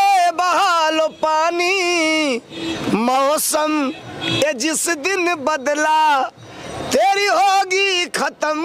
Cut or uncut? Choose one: uncut